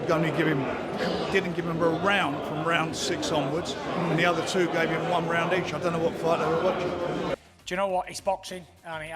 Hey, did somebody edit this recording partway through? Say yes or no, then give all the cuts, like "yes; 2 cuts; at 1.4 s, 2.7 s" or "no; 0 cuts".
yes; 1 cut; at 7.1 s